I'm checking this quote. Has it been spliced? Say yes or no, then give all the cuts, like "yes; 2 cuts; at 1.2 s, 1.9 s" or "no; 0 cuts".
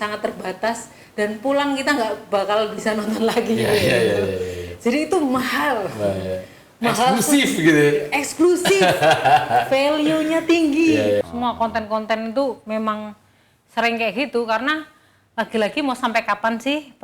yes; 1 cut; at 11.2 s